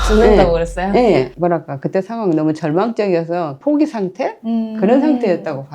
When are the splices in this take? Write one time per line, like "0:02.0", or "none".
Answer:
0:03.5